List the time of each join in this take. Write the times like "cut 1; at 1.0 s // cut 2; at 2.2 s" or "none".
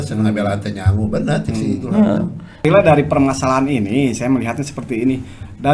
cut 1; at 2.6 s